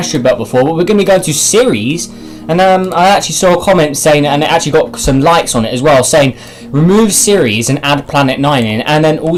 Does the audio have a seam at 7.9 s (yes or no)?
no